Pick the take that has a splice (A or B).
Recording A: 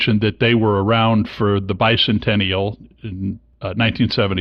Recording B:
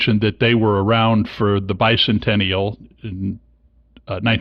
A